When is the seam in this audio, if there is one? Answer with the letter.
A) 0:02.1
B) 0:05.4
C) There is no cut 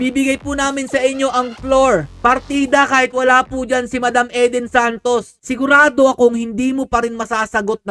C